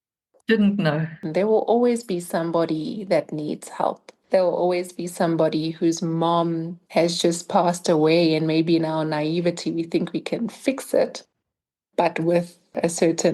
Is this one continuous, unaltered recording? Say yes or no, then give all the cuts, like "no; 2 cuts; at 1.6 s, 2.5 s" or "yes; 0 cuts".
no; 1 cut; at 1.2 s